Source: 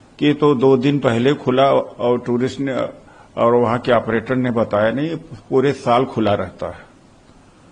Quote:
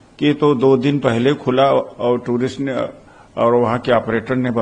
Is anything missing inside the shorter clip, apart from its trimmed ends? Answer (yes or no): no